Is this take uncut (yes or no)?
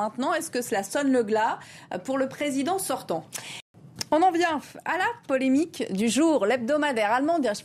yes